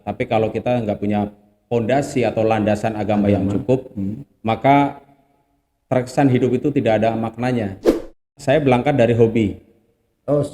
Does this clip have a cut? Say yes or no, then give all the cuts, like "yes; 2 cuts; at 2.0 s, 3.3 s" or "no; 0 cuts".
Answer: yes; 1 cut; at 8.2 s